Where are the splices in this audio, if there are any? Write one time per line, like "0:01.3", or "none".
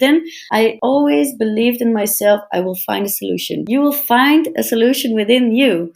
0:03.6